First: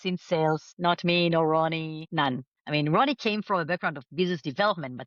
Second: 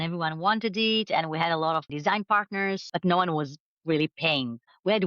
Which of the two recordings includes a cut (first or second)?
second